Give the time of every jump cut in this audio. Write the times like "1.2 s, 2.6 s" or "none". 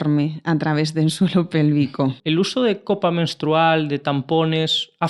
2.2 s